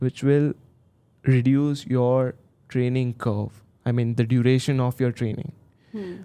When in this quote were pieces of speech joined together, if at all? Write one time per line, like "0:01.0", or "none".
none